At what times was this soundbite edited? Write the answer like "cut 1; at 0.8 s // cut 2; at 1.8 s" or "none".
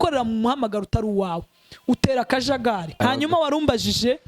cut 1; at 2.9 s